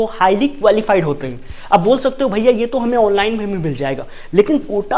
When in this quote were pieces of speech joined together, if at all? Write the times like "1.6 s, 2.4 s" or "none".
none